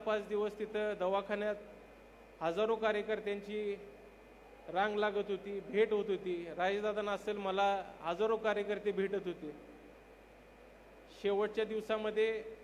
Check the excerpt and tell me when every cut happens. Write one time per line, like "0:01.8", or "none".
0:09.9